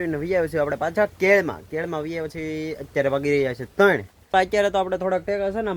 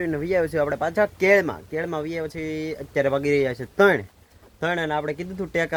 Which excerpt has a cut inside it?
first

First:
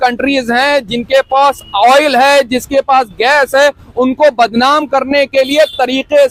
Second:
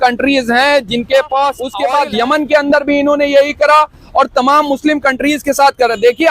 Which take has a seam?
second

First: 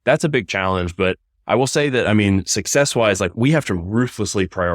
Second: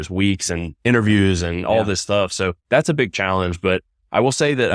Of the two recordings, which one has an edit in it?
first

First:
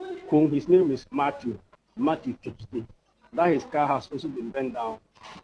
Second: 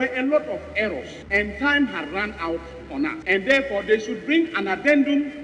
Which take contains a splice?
second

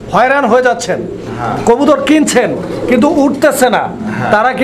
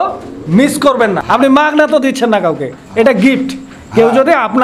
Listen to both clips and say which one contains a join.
second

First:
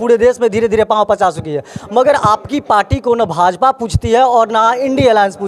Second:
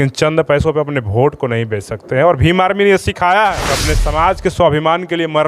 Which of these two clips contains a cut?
second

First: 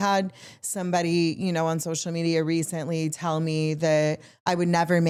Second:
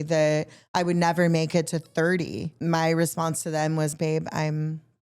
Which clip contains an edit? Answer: second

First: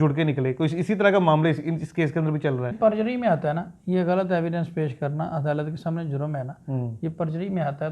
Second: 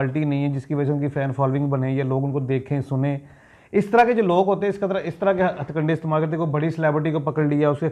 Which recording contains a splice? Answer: first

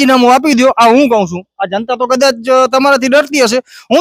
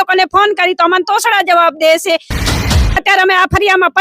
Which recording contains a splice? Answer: second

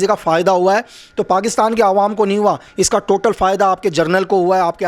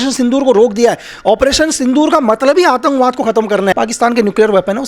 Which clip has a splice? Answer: second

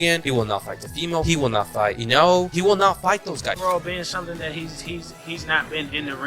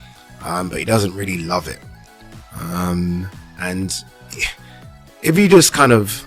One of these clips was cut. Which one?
first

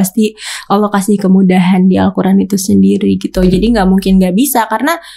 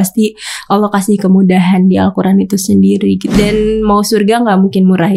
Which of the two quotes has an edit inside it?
second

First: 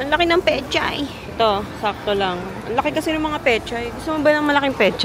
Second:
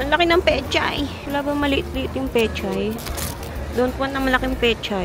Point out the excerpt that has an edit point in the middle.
first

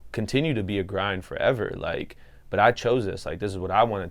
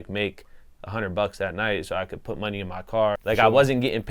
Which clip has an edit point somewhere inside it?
second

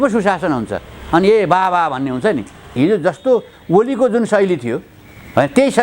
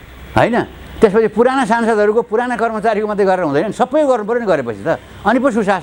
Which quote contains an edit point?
first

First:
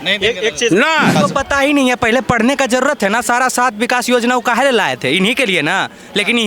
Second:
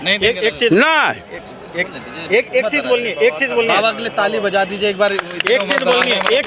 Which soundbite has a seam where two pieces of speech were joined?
first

